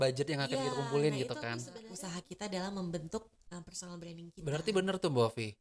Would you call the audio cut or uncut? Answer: cut